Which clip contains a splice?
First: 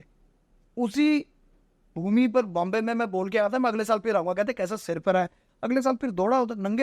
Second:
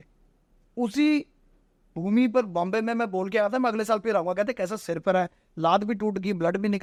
first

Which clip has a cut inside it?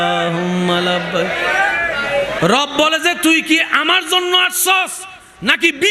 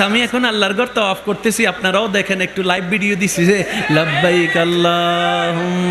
first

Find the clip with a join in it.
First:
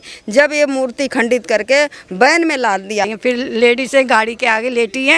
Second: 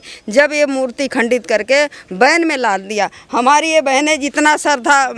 first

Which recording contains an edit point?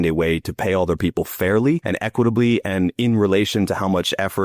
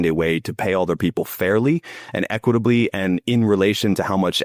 first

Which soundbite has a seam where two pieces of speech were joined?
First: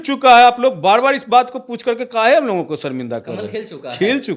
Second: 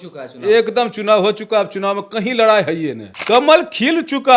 second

